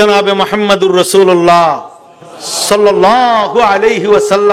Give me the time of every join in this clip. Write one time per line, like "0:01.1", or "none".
none